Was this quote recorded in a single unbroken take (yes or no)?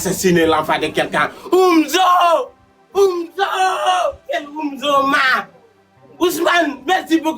yes